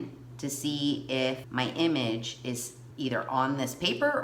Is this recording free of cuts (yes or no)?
yes